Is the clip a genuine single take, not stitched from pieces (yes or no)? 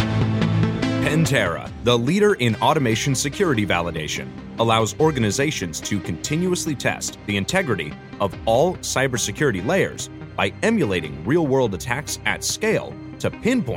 no